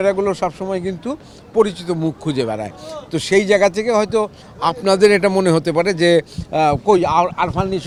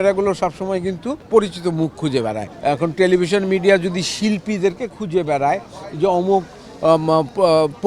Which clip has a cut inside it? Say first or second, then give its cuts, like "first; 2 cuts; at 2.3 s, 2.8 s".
second; 2 cuts; at 1.1 s, 2.5 s